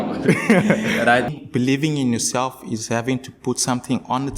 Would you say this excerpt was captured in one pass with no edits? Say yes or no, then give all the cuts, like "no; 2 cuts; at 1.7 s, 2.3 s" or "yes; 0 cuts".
no; 1 cut; at 1.3 s